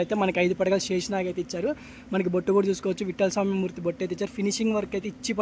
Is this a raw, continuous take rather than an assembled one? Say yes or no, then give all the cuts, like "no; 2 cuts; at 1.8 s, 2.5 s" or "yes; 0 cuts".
yes; 0 cuts